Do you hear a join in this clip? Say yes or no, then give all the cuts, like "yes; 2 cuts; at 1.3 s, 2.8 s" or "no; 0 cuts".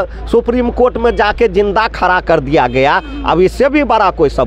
no; 0 cuts